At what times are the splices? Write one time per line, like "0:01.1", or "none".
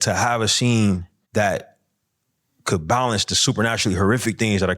0:01.1